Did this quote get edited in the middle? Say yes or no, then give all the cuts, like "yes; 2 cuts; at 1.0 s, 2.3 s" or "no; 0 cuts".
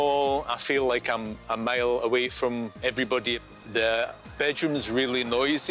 yes; 1 cut; at 3.4 s